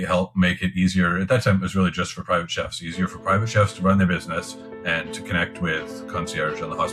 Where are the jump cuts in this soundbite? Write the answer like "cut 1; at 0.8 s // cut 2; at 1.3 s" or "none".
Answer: none